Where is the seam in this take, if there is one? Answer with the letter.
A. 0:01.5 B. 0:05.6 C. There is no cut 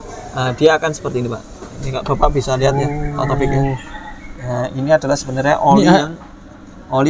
C